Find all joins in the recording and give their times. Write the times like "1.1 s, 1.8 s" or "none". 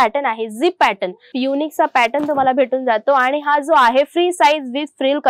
1.3 s